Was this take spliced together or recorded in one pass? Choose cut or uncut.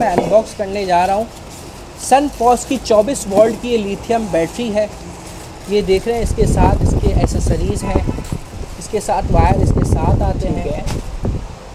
uncut